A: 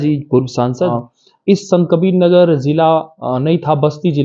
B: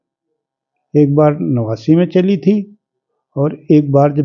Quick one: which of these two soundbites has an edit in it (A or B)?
A